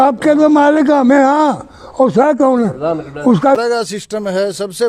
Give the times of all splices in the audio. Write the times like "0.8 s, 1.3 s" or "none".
3.6 s